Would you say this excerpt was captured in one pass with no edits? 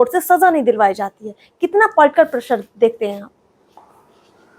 yes; 0 cuts

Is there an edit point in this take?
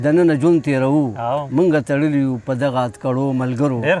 no; 0 cuts

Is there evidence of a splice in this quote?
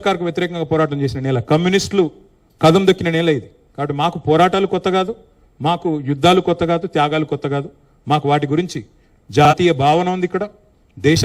no; 0 cuts

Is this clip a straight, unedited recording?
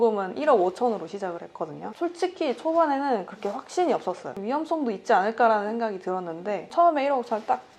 yes; 0 cuts

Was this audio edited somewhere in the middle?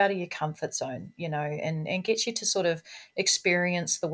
no; 0 cuts

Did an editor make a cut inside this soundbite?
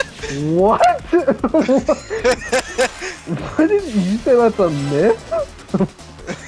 no; 0 cuts

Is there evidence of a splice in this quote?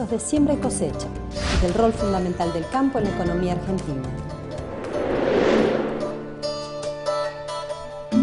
yes; 1 cut; at 7.2 s

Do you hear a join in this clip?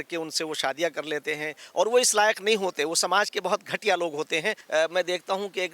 yes; 1 cut; at 4.6 s

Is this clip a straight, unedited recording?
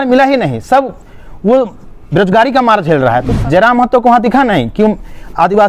no; 1 cut; at 3.3 s

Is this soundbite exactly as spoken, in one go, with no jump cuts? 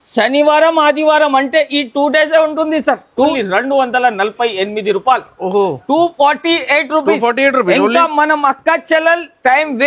no; 1 cut; at 3.1 s

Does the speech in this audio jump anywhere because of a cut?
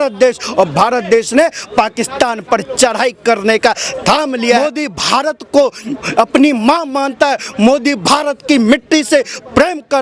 yes; 1 cut; at 4.6 s

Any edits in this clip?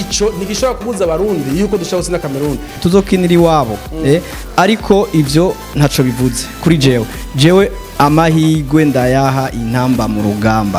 yes; 1 cut; at 2.8 s

